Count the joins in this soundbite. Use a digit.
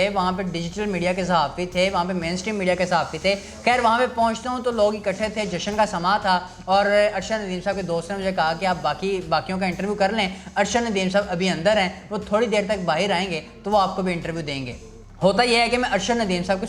0